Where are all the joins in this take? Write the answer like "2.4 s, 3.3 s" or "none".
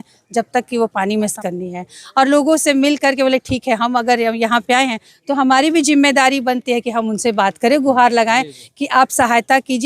1.3 s